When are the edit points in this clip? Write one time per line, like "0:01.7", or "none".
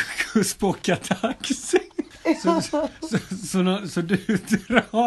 0:02.1